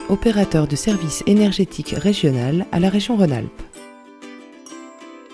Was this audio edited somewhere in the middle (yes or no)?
yes